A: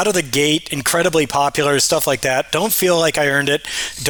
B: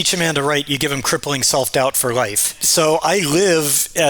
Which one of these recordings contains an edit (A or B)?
B